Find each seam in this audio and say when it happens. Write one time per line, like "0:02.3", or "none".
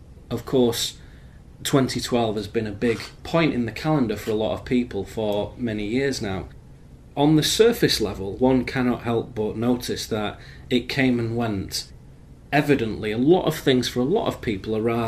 none